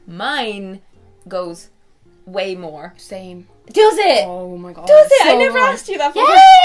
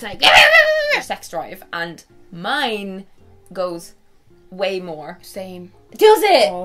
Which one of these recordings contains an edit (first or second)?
second